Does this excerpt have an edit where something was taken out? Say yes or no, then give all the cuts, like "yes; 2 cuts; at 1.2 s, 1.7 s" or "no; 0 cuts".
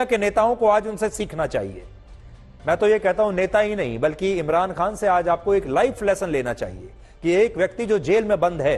no; 0 cuts